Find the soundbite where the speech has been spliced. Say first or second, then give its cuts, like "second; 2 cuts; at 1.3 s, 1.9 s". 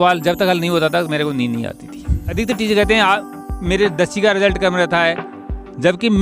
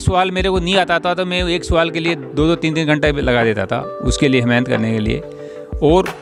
first; 1 cut; at 2.2 s